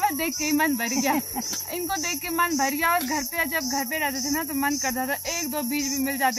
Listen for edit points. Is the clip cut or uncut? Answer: uncut